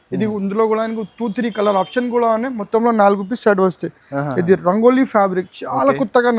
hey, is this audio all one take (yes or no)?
yes